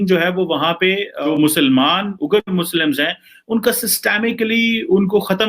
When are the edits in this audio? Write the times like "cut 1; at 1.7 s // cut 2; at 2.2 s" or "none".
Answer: cut 1; at 1.2 s